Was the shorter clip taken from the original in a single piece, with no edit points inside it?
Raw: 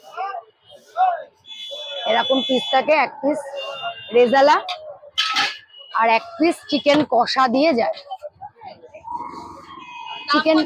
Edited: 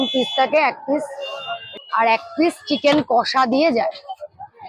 no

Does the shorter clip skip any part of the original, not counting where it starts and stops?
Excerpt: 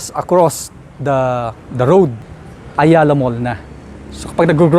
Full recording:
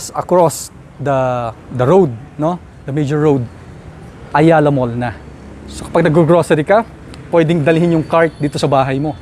yes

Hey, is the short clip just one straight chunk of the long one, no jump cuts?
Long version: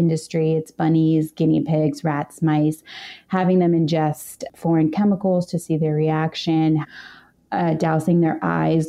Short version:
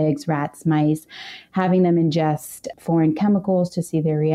yes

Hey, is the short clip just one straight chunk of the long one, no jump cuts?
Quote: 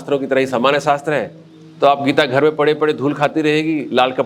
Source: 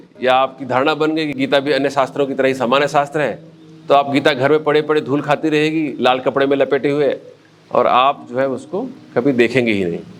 yes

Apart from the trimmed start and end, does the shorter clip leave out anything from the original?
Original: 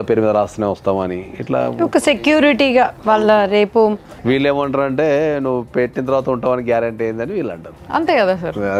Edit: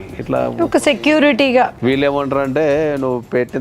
yes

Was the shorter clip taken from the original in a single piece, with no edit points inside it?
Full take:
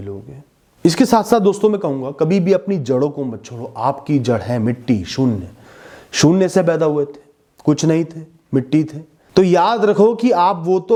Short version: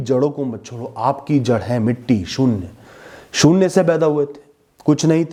yes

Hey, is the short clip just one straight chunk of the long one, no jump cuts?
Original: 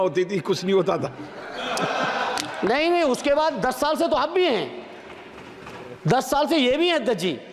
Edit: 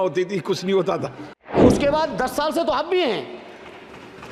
no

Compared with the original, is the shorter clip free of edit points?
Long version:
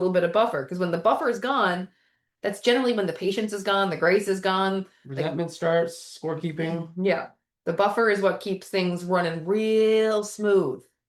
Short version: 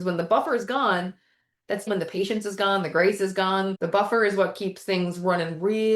no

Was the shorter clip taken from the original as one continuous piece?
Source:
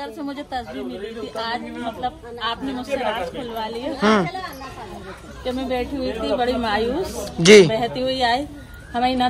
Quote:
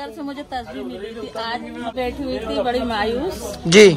no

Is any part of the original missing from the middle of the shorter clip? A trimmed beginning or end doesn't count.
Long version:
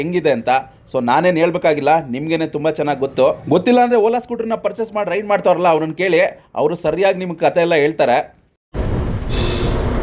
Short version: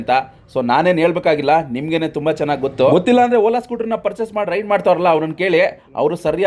yes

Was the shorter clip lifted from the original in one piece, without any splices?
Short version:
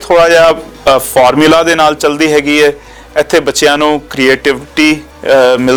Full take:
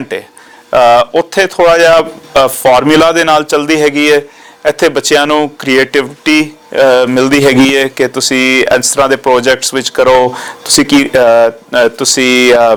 yes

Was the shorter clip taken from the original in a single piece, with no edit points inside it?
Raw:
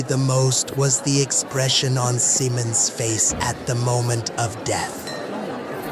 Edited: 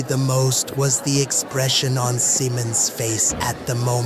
yes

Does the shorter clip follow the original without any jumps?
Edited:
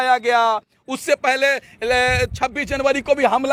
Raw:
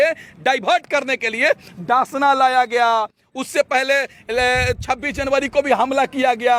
yes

